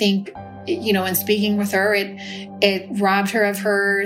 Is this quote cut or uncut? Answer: uncut